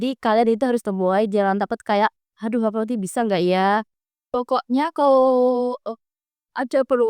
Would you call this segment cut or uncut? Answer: cut